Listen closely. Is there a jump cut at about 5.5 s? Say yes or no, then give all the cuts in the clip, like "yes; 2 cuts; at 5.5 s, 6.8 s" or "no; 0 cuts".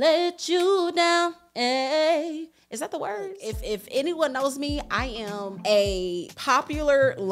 yes; 3 cuts; at 3.4 s, 5.5 s, 6.3 s